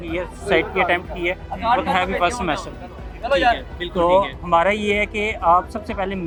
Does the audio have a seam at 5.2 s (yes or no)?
no